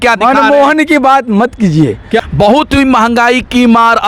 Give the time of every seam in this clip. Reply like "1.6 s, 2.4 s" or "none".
2.2 s